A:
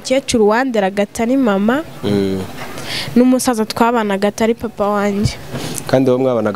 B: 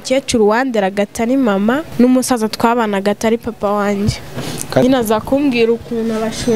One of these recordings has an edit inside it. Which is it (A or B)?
B